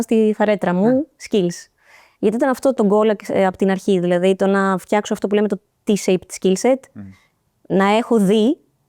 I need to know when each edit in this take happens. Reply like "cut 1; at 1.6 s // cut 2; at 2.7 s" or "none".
cut 1; at 2.8 s